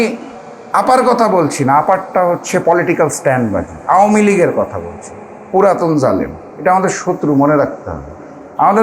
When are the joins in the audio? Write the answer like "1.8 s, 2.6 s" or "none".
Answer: none